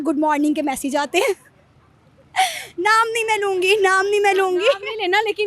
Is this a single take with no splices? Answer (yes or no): yes